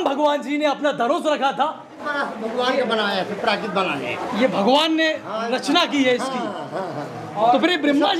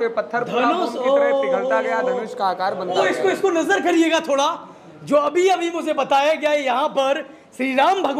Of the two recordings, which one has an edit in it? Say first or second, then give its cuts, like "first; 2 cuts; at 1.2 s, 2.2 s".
first; 1 cut; at 2.0 s